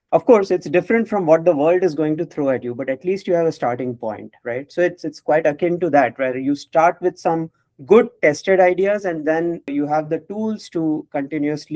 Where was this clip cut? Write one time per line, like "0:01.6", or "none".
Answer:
0:09.7

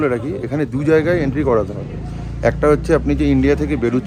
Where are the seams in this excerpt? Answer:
none

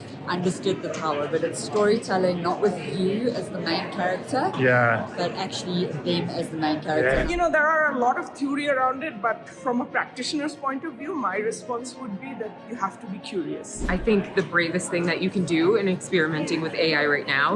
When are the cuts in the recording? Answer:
0:07.2
0:13.9

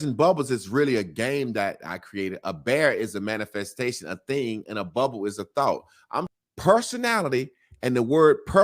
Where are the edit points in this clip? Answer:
0:06.3

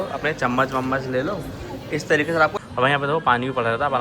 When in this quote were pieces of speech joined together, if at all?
0:02.6

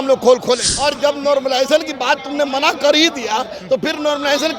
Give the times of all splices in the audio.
0:01.0

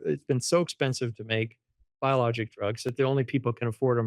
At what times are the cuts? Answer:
none

